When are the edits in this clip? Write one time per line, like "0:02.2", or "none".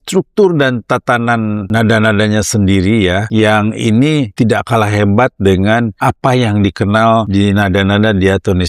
0:01.6
0:03.3
0:04.3
0:05.9
0:07.3